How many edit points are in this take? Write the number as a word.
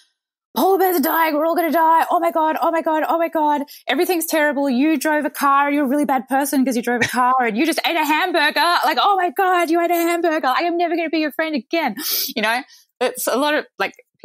zero